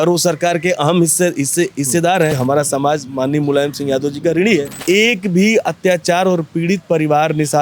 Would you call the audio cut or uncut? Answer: cut